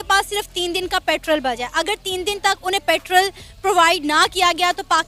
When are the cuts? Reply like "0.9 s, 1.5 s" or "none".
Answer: none